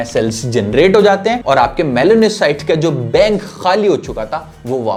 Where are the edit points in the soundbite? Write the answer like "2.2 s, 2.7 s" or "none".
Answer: none